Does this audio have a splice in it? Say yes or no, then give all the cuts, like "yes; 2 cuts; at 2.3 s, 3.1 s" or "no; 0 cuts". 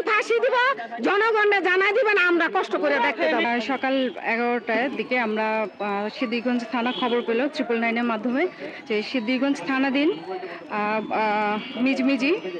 no; 0 cuts